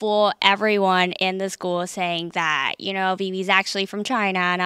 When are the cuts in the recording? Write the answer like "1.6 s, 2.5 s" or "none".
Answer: none